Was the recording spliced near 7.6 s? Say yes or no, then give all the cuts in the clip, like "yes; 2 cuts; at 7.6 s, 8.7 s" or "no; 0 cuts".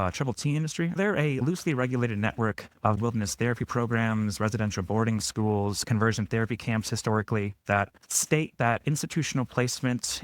yes; 3 cuts; at 1.0 s, 3.0 s, 7.6 s